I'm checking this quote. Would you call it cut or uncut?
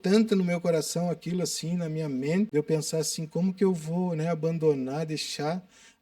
cut